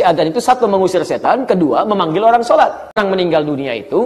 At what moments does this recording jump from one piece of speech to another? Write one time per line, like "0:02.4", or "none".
0:03.0